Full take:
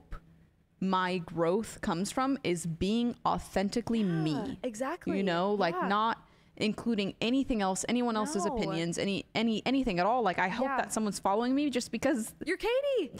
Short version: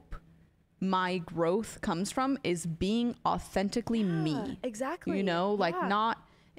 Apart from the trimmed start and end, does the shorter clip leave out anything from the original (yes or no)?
no